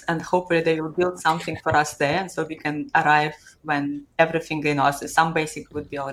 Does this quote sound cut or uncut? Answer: uncut